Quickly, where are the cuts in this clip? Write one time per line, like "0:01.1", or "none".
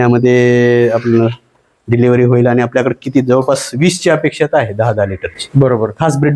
none